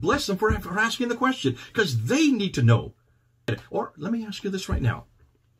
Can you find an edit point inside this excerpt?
yes; 1 cut; at 3.6 s

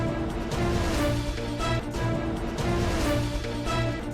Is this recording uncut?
yes; 0 cuts

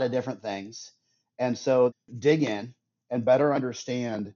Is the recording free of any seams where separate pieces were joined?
no; 1 cut; at 2.0 s

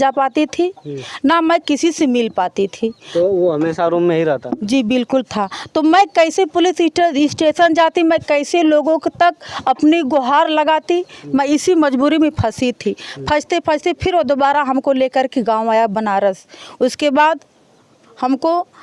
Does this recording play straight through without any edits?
yes; 0 cuts

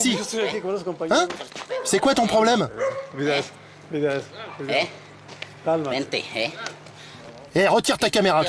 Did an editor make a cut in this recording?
no; 0 cuts

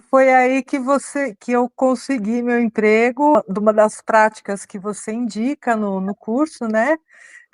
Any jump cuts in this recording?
yes; 1 cut; at 3.4 s

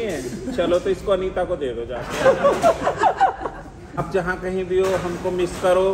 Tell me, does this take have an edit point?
yes; 1 cut; at 4.0 s

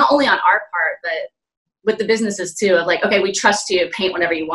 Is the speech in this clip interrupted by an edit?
no; 0 cuts

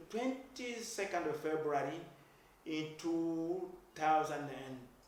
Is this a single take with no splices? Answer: yes; 0 cuts

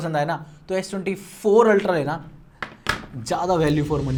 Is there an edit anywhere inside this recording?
no; 0 cuts

